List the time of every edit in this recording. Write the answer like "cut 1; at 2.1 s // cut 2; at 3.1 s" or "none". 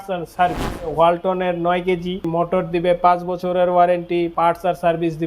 cut 1; at 0.9 s // cut 2; at 2.3 s // cut 3; at 4.3 s